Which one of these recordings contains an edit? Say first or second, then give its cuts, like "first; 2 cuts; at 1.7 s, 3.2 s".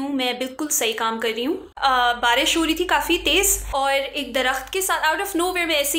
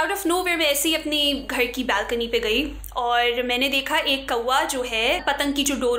first; 2 cuts; at 1.7 s, 3.6 s